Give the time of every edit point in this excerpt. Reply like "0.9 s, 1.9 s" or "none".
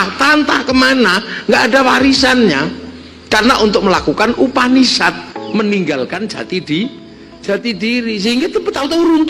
5.3 s